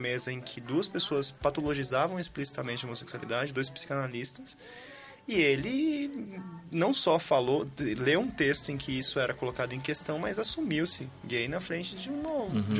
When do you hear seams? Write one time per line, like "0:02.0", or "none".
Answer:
none